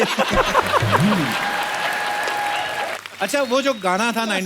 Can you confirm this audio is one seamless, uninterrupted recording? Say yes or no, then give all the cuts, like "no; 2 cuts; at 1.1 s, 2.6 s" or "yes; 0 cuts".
no; 1 cut; at 3.0 s